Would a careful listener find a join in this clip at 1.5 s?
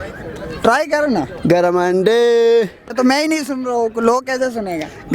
no; 1 cut; at 2.9 s

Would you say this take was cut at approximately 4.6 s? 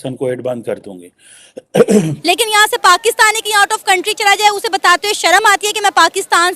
no; 1 cut; at 2.1 s

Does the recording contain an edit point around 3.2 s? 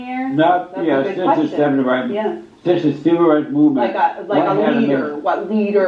no; 0 cuts

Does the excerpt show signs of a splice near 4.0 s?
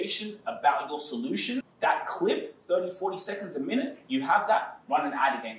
no; 1 cut; at 1.7 s

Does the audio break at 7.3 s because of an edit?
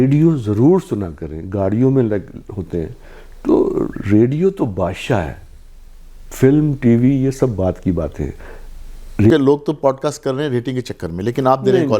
no; 1 cut; at 9.3 s

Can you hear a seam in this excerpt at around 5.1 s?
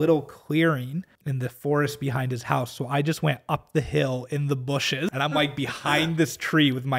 yes; 2 cuts; at 1.2 s, 5.1 s

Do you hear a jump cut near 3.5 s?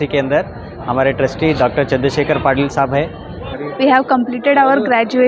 yes; 1 cut; at 3.5 s

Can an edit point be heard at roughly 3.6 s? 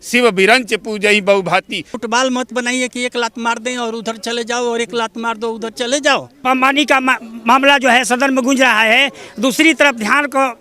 no; 2 cuts; at 1.9 s, 6.4 s

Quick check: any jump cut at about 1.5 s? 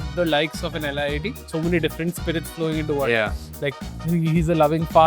yes; 1 cut; at 1.5 s

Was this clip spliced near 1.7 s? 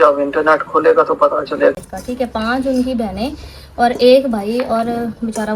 yes; 1 cut; at 1.7 s

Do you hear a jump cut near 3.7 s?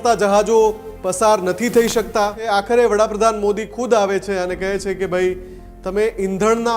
no; 1 cut; at 2.4 s

